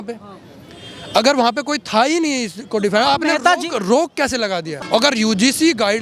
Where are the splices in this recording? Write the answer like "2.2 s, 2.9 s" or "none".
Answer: 4.7 s

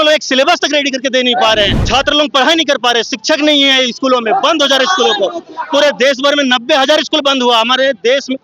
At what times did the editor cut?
1.8 s

